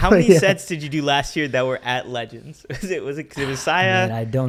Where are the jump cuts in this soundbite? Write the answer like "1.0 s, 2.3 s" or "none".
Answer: none